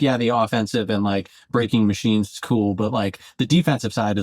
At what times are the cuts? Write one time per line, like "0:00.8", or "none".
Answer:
none